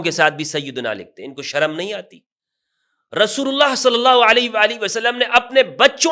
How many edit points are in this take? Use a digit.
0